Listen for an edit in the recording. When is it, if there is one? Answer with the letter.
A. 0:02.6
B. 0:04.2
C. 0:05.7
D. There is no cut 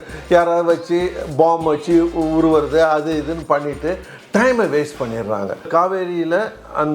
C